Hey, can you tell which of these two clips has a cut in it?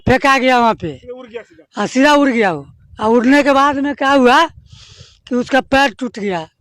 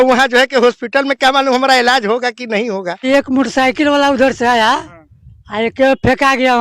second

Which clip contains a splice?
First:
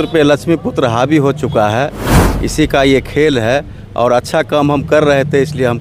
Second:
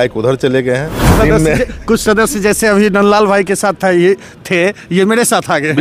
second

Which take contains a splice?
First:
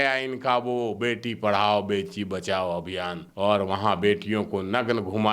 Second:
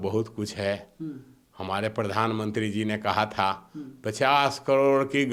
first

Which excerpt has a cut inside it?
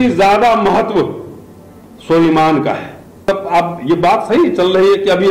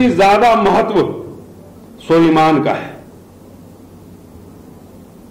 first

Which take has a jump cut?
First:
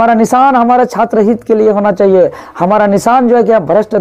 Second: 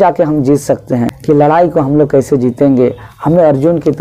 second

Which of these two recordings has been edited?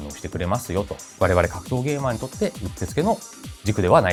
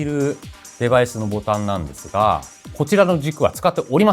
second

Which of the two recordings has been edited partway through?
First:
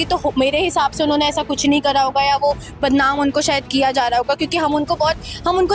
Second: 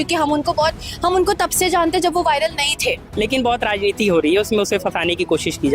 second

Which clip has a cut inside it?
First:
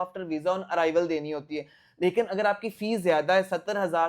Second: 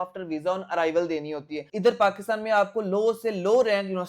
second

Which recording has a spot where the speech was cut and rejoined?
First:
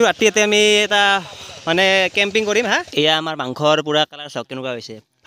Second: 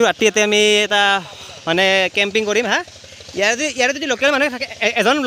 first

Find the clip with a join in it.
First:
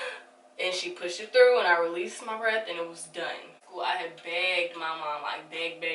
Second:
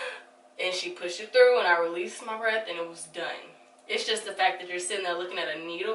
first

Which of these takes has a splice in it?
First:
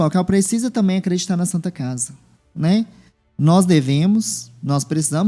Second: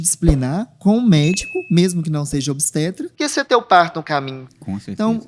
second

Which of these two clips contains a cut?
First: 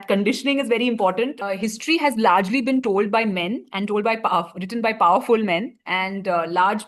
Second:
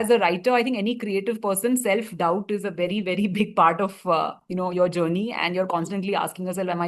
first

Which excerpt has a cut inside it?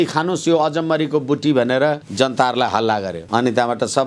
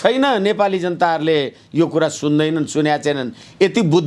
first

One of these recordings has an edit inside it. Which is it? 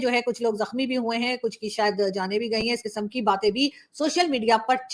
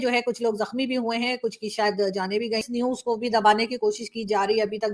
second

